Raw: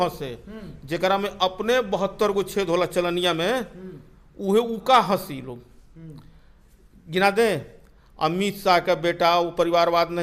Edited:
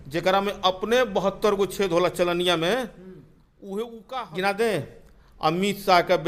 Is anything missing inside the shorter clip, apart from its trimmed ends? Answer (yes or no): yes